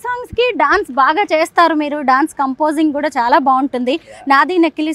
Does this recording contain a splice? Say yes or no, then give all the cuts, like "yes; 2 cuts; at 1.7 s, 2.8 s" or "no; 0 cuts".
no; 0 cuts